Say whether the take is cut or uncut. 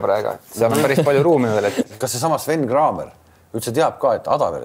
cut